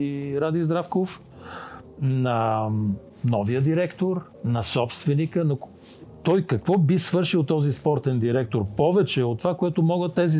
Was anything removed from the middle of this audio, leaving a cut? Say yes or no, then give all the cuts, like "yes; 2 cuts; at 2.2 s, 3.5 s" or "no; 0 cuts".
yes; 2 cuts; at 3.1 s, 4.3 s